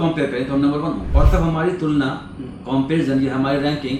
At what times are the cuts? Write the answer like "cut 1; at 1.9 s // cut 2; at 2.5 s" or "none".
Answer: cut 1; at 1.1 s